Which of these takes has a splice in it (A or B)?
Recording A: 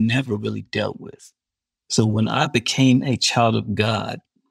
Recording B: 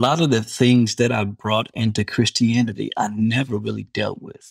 A